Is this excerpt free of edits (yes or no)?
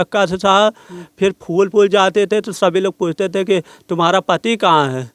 yes